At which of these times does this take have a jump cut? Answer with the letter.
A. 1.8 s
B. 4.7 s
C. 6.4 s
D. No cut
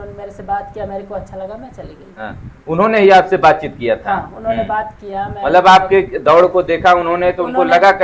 D